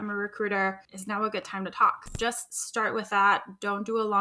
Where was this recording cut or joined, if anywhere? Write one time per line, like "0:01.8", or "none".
0:00.9
0:02.1